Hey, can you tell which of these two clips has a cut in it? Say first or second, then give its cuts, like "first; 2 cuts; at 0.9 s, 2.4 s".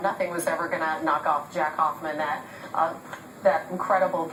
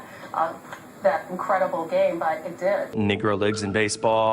second; 1 cut; at 2.9 s